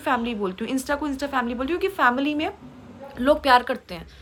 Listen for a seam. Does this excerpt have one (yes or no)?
no